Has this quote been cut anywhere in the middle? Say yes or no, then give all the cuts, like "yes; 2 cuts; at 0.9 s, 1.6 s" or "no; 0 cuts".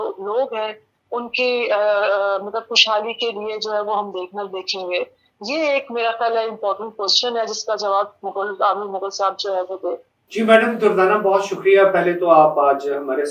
no; 0 cuts